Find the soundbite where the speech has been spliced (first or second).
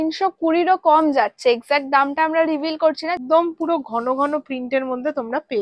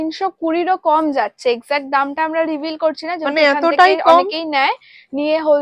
first